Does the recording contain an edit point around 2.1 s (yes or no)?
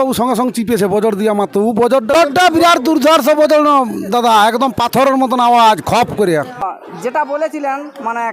yes